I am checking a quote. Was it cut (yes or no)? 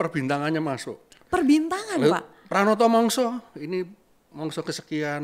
no